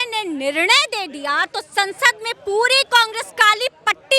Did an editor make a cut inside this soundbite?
no; 0 cuts

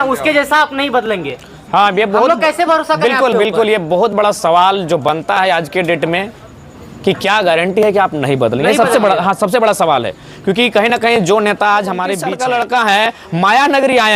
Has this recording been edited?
yes; 1 cut; at 12.2 s

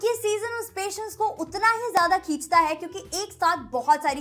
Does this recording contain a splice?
no; 0 cuts

